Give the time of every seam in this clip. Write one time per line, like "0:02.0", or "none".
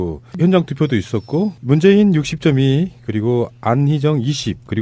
0:01.2